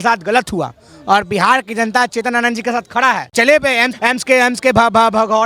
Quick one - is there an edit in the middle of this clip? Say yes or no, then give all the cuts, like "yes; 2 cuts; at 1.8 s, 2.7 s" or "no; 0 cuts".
yes; 2 cuts; at 3.3 s, 3.9 s